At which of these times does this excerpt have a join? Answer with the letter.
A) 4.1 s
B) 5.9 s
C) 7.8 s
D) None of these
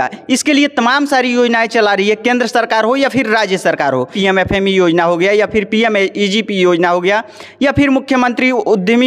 A